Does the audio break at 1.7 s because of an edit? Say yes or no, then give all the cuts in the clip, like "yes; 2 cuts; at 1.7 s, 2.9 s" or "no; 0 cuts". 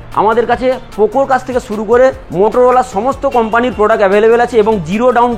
no; 0 cuts